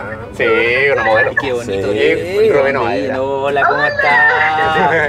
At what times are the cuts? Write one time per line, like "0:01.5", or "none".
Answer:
none